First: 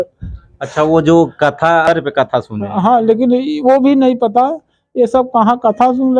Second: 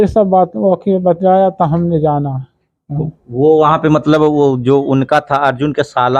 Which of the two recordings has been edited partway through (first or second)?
first